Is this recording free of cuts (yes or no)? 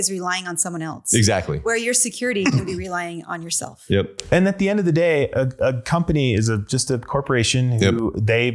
yes